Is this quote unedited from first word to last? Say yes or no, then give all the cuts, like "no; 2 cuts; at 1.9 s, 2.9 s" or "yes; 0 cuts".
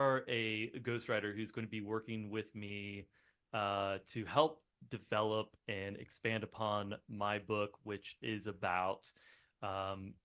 yes; 0 cuts